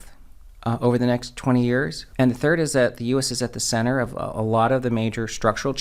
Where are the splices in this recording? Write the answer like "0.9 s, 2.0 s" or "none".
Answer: 2.0 s